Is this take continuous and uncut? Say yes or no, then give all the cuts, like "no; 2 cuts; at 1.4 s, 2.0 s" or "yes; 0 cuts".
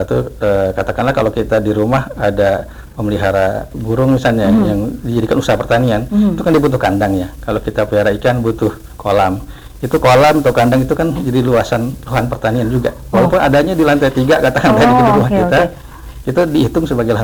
yes; 0 cuts